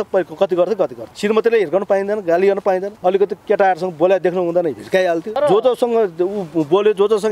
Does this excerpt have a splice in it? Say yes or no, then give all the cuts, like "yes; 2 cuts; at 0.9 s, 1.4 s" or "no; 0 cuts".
yes; 3 cuts; at 1.0 s, 2.9 s, 5.3 s